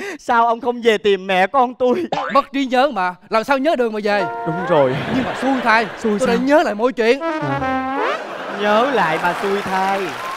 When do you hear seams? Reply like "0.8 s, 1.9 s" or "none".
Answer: none